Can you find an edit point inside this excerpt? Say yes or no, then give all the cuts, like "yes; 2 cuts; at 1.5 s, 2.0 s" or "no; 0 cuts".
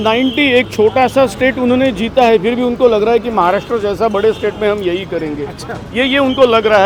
no; 0 cuts